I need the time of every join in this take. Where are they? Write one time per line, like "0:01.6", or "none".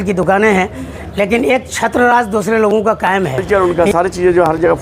0:03.4